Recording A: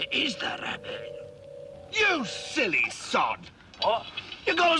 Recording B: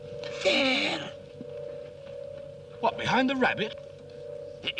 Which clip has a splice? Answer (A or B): A